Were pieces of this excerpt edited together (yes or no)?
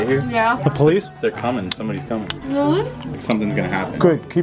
yes